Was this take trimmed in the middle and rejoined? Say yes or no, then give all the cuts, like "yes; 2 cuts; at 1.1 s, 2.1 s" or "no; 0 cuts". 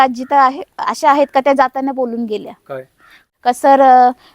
yes; 1 cut; at 3.2 s